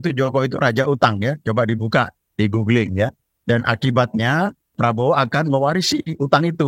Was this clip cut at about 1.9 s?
no; 2 cuts; at 3.3 s, 4.7 s

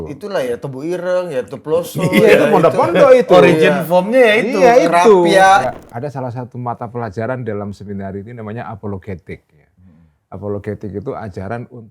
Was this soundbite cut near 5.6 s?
yes; 1 cut; at 5.6 s

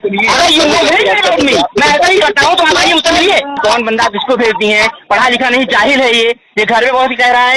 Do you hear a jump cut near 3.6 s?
yes; 1 cut; at 3.6 s

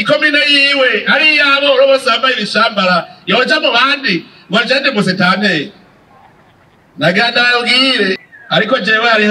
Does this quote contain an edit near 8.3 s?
yes; 1 cut; at 8.3 s

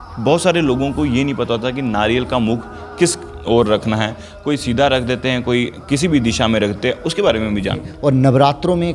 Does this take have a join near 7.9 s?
yes; 1 cut; at 7.9 s

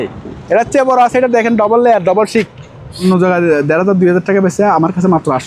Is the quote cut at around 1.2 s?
no; 1 cut; at 3.0 s

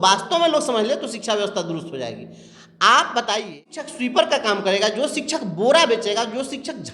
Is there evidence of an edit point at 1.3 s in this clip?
no; 1 cut; at 3.9 s

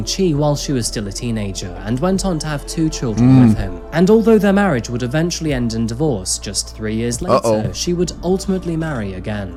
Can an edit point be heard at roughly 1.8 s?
no; 0 cuts

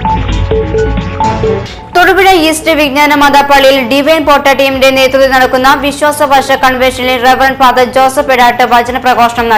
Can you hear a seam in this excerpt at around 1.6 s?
yes; 1 cut; at 1.6 s

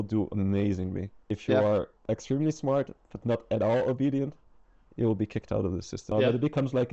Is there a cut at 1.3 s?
yes; 3 cuts; at 1.3 s, 1.9 s, 6.1 s

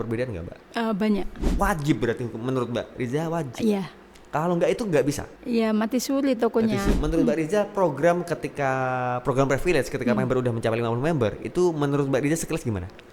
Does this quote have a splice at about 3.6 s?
no; 2 cuts; at 1.5 s, 6.9 s

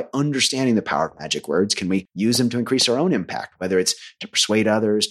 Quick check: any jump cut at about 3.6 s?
no; 1 cut; at 2.1 s

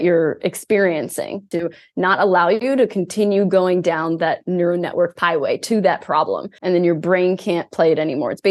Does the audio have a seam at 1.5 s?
yes; 4 cuts; at 1.5 s, 2.6 s, 5.1 s, 6.5 s

